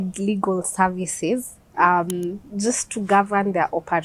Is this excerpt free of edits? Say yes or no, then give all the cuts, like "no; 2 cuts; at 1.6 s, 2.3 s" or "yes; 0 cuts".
yes; 0 cuts